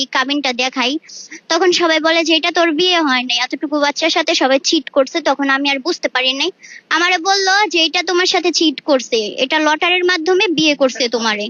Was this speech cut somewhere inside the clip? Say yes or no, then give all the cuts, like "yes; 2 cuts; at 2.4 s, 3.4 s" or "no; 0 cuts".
no; 0 cuts